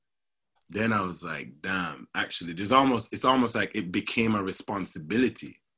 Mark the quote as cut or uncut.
uncut